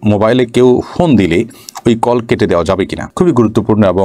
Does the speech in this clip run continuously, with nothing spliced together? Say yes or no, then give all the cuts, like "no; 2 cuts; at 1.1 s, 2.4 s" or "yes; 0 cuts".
yes; 0 cuts